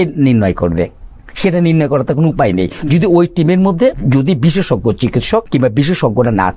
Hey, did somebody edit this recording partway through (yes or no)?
yes